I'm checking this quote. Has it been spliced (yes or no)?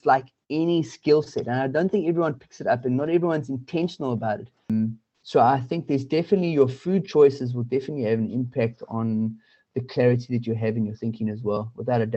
yes